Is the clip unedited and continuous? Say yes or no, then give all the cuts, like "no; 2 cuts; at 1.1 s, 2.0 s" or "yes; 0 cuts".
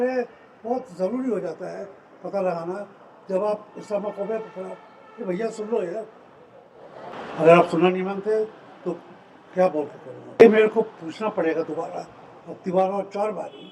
no; 2 cuts; at 7.1 s, 10.4 s